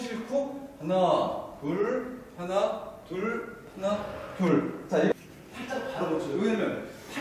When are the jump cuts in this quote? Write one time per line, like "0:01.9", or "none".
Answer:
0:05.1